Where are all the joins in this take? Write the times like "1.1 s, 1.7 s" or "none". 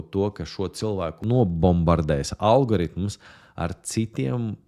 1.2 s